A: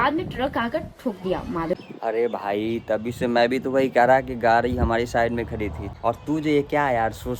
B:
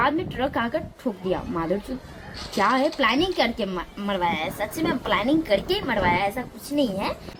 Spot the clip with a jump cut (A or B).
A